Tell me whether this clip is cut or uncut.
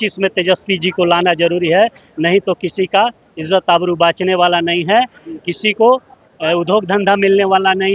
uncut